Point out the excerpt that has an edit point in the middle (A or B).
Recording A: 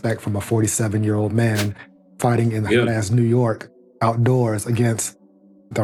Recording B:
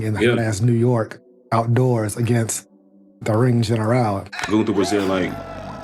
B